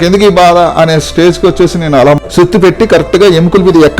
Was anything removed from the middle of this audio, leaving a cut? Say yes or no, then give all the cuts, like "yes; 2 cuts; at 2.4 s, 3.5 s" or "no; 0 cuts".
yes; 1 cut; at 2.2 s